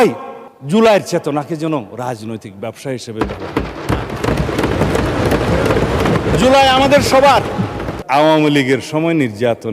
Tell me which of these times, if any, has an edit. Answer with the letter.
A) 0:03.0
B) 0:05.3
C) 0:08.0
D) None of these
C